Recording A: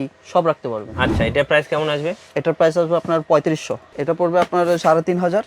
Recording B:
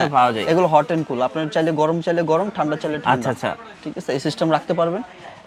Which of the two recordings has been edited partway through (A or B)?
A